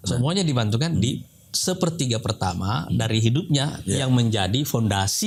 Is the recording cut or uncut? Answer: uncut